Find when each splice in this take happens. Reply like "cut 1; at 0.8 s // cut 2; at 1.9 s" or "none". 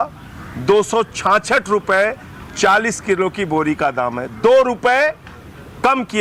none